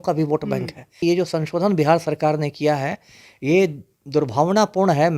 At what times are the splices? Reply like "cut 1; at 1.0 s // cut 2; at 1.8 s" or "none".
cut 1; at 1.0 s